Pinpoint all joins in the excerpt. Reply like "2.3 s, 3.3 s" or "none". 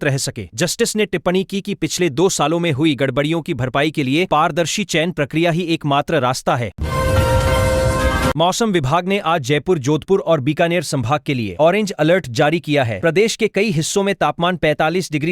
6.8 s, 8.4 s